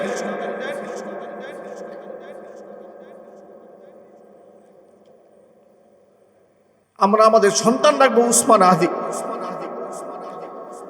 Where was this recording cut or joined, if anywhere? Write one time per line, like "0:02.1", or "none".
0:06.8

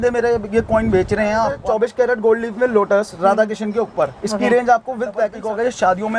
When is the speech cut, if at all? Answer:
0:01.6
0:05.4

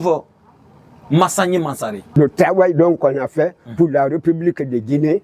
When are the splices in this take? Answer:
0:02.1

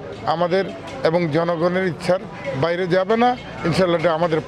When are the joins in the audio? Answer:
none

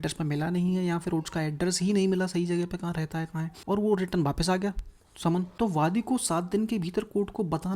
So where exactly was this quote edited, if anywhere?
0:03.5
0:05.5

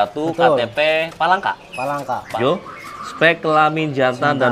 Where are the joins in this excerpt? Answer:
0:02.3

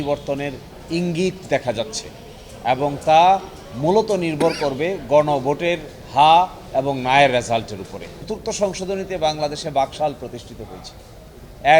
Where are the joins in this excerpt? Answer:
0:08.3

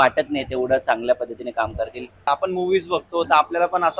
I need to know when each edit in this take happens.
0:02.3

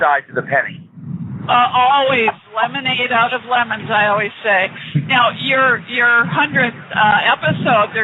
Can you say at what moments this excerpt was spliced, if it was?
none

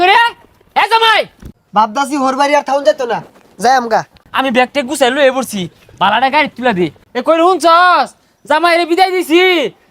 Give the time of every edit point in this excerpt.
0:01.4
0:04.2
0:07.0

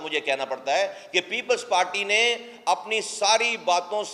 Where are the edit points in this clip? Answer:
none

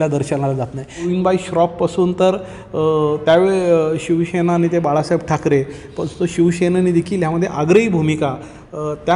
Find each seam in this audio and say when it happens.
0:01.1

